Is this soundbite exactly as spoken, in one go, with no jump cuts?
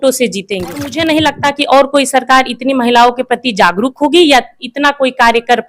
no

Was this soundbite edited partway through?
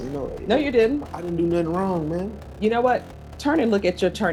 no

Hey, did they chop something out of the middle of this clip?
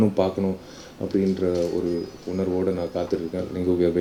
no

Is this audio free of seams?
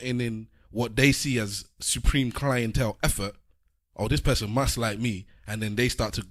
yes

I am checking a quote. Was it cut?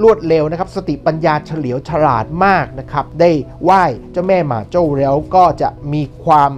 yes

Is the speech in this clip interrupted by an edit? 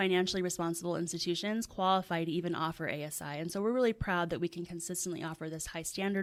no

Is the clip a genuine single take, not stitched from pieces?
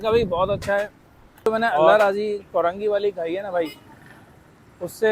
no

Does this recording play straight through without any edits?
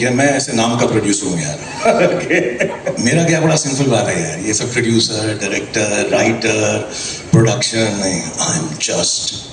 yes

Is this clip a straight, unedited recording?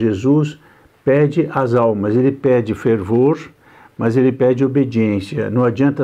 yes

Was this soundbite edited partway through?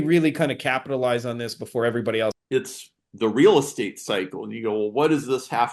yes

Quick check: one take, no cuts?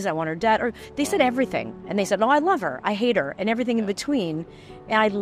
yes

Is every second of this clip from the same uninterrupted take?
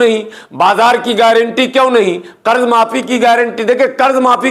yes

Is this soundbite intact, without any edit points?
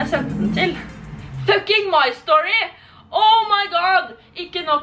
yes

